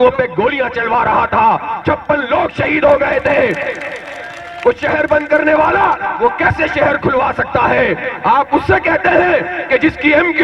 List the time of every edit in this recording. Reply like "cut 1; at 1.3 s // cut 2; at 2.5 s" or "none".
none